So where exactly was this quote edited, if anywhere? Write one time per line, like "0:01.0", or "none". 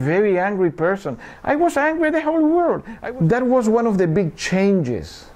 0:02.9